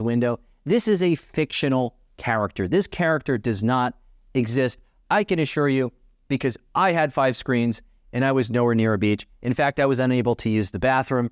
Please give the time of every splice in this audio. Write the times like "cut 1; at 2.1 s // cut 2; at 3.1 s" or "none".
none